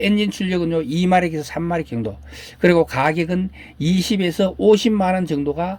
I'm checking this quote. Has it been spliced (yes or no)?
no